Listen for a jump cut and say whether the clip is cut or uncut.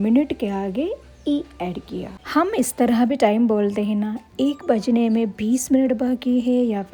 uncut